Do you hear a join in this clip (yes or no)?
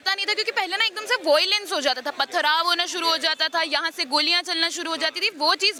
no